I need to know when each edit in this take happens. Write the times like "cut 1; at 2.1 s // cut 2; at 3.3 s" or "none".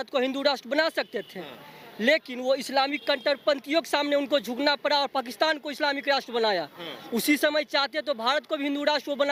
none